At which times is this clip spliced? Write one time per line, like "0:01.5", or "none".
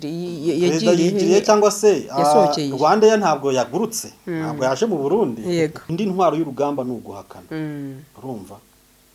0:05.8